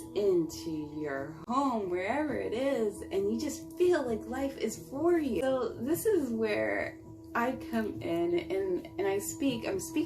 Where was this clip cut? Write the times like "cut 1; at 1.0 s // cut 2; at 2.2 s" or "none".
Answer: cut 1; at 5.4 s